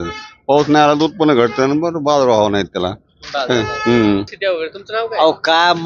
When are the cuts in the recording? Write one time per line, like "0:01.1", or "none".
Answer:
0:04.3